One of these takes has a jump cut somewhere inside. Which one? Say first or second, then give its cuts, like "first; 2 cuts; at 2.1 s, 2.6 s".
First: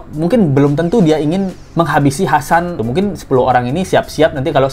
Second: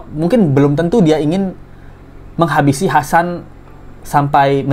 first; 2 cuts; at 1.6 s, 2.8 s